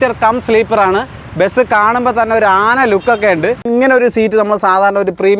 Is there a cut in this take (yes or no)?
yes